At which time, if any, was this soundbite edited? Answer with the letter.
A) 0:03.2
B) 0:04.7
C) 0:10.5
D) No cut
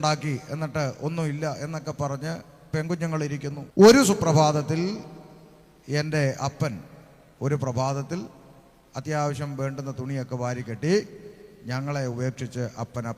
A